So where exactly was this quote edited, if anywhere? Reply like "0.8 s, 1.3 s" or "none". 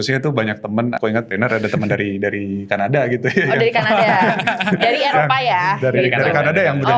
1.0 s